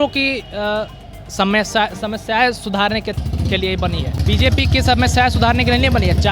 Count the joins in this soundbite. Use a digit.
1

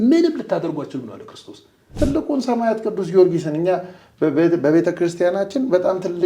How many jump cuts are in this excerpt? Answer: 1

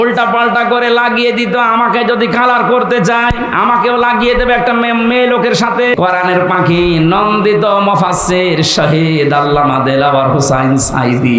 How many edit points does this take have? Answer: 1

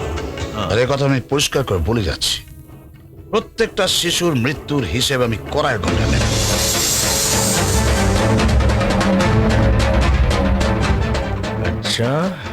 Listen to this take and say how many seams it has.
0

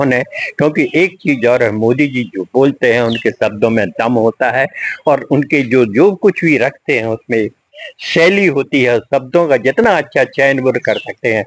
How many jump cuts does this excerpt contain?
0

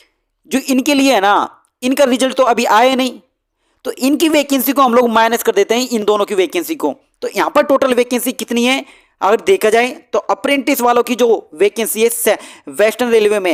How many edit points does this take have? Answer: 0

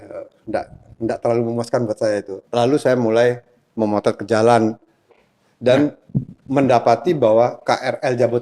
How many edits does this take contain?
1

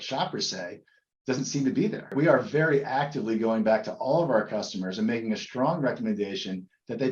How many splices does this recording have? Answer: 1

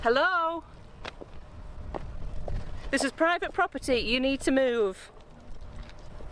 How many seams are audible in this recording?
0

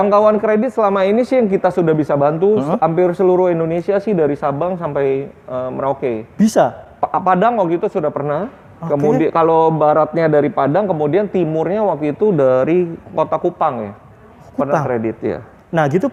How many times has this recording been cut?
0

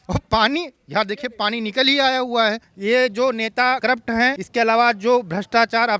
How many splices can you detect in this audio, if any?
2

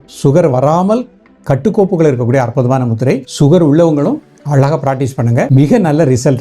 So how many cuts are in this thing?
2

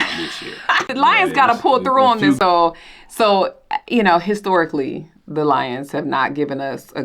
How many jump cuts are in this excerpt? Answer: 2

